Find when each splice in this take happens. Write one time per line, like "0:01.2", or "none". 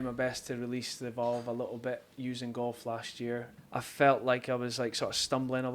0:03.5